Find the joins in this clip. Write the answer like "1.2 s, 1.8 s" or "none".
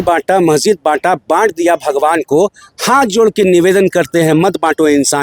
none